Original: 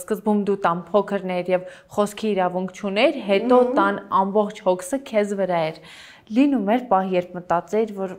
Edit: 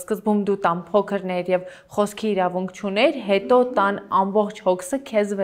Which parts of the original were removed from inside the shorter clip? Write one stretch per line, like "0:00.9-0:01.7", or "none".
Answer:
none

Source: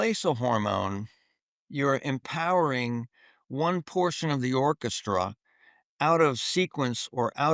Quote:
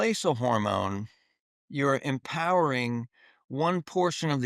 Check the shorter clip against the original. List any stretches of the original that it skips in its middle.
none

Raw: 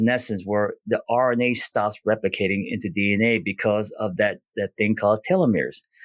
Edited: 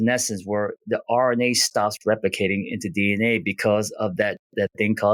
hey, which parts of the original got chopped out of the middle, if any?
none

